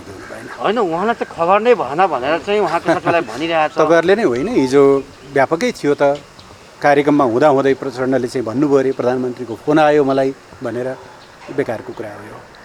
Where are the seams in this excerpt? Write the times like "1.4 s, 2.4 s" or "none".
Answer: none